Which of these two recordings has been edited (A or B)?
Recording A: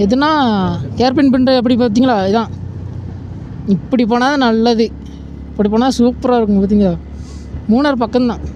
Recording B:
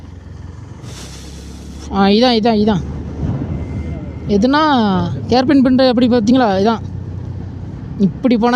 B